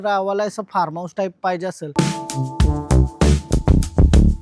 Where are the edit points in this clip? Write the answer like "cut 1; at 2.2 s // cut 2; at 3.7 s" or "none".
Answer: cut 1; at 1.9 s